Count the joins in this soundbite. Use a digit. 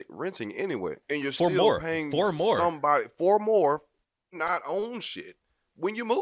1